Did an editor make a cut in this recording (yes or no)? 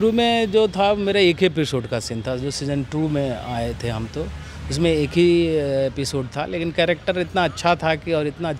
no